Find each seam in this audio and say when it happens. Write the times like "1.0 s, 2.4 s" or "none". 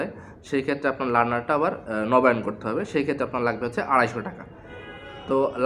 none